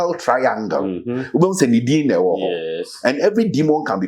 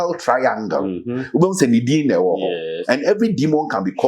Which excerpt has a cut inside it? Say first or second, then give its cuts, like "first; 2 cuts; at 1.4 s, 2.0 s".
second; 1 cut; at 2.7 s